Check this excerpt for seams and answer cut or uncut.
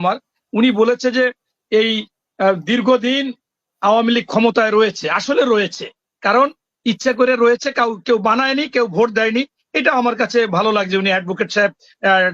uncut